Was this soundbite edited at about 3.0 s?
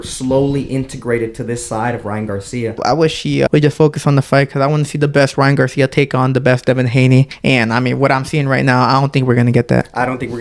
yes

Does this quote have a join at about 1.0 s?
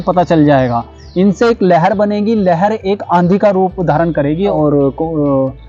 no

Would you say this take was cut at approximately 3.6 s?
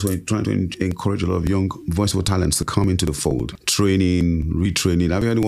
yes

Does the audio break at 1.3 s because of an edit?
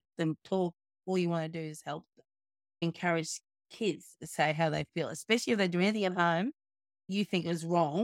no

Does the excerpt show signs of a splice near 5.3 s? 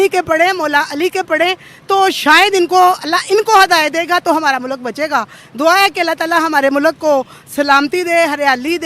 no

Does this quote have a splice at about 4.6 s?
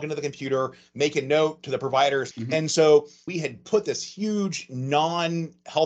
no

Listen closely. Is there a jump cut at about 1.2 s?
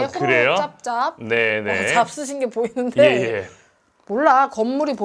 no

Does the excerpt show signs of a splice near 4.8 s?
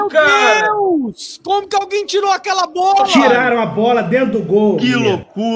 yes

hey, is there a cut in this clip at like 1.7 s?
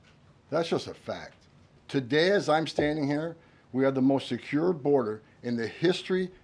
yes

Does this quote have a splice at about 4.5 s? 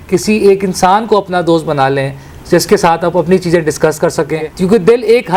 yes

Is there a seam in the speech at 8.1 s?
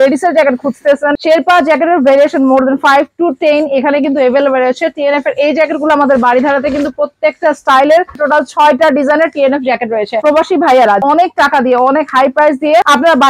yes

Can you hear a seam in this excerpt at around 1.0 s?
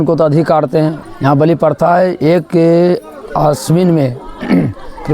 yes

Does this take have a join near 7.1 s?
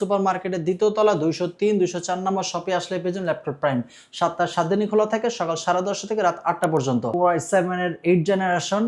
yes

